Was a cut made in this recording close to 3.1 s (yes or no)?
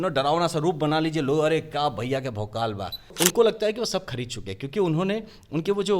yes